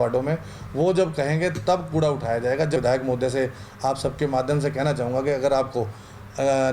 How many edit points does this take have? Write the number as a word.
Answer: one